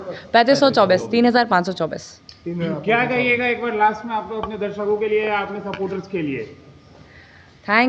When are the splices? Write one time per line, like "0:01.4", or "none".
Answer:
none